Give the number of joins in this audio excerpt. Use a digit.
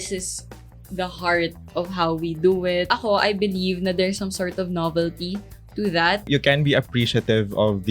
2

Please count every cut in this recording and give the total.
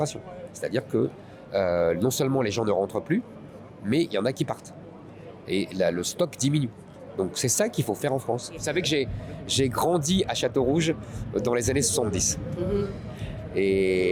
1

